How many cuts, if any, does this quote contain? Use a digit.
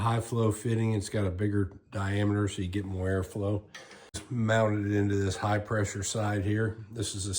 1